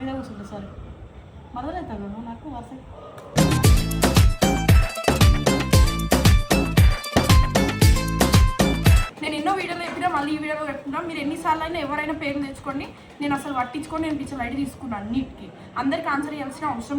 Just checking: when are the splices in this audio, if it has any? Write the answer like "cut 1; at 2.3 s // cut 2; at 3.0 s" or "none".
cut 1; at 9.1 s